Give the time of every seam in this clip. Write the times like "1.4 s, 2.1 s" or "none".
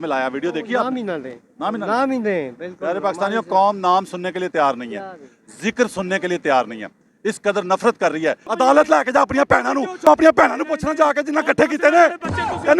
8.4 s, 10.0 s